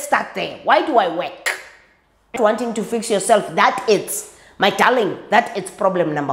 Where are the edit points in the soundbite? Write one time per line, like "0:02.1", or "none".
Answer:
0:02.3